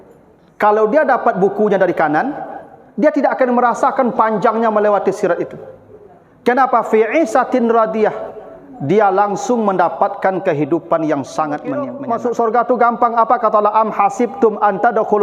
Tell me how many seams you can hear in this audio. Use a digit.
1